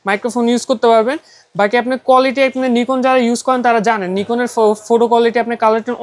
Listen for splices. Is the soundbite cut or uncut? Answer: uncut